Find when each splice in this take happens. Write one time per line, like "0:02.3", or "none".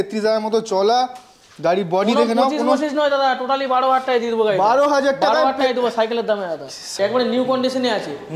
0:06.9